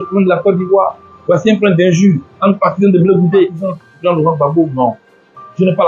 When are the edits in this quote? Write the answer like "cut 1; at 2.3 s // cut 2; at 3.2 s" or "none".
cut 1; at 3.6 s